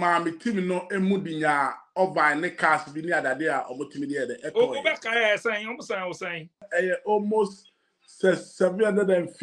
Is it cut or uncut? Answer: cut